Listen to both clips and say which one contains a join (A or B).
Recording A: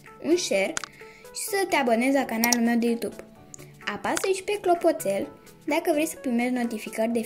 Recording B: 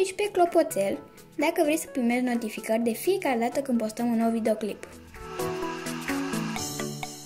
B